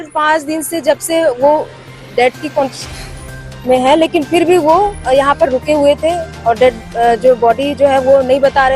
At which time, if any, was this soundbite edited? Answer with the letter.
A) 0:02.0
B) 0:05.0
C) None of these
C